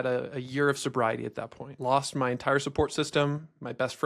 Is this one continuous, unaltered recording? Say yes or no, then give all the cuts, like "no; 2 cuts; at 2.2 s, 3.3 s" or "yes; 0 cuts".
no; 1 cut; at 1.7 s